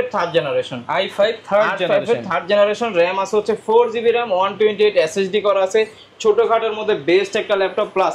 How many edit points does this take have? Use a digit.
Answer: 0